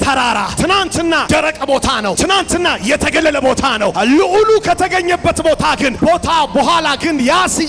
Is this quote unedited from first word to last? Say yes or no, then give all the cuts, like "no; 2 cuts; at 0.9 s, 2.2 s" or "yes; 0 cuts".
no; 4 cuts; at 1.0 s, 2.2 s, 3.9 s, 5.9 s